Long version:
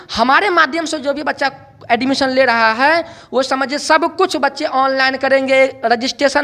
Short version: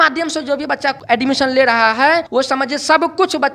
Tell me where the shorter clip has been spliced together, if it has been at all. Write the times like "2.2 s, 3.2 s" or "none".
1.0 s, 2.3 s